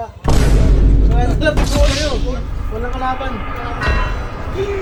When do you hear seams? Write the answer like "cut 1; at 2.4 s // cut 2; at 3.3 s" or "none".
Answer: none